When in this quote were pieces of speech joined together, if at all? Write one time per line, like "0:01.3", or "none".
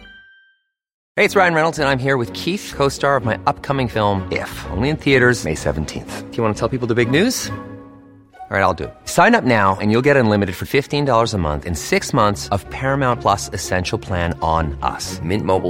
0:00.9